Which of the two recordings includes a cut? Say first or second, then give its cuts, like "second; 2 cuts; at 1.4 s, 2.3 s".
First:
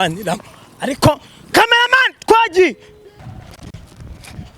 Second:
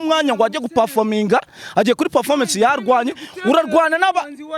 first; 1 cut; at 3.2 s